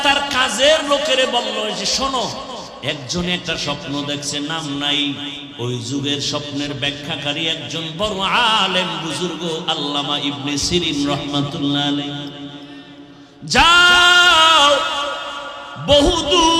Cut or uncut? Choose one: cut